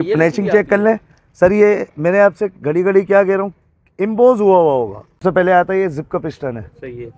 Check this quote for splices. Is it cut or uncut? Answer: cut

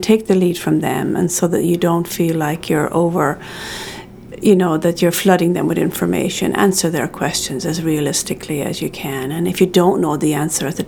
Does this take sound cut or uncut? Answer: uncut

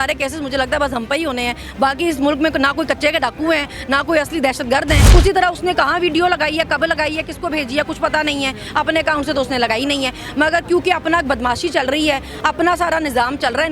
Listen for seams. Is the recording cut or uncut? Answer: cut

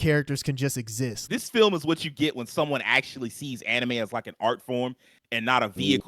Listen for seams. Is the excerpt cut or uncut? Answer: cut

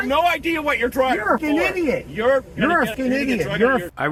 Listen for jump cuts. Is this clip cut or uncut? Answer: uncut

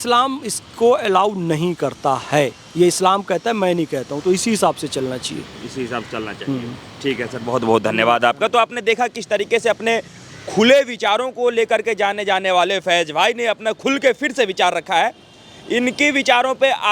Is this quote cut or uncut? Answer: uncut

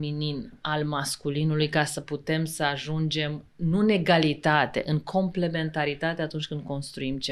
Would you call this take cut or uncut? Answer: uncut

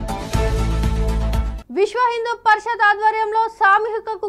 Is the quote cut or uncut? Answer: cut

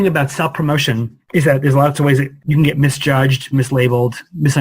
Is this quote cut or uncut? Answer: cut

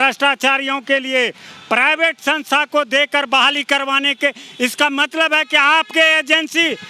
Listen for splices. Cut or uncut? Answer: uncut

